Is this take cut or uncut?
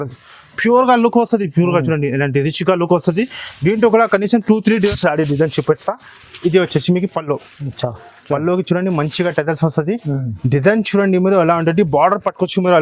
cut